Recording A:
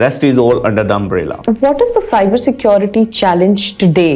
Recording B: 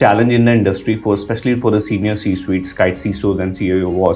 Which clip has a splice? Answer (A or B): A